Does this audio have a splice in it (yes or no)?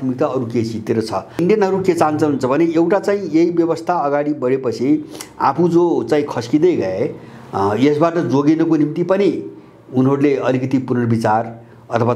yes